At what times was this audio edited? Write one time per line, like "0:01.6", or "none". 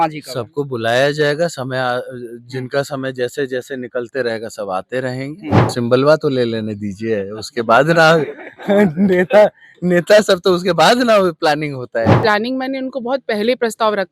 0:05.7
0:12.2

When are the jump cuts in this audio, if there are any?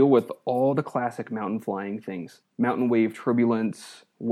0:02.4

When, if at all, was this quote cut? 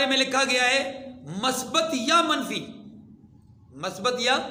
none

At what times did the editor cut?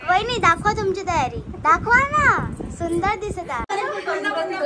0:03.7

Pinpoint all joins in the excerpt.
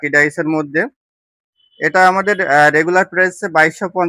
none

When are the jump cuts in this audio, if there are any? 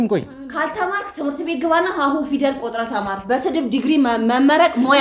none

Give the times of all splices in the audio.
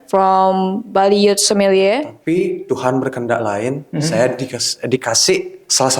0:02.1

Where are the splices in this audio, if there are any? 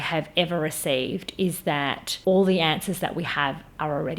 0:02.1

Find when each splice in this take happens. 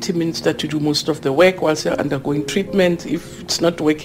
none

